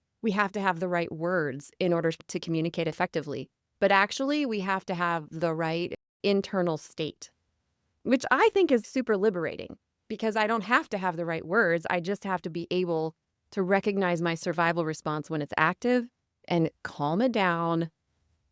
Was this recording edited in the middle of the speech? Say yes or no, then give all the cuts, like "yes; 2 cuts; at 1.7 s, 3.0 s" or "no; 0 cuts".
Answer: no; 0 cuts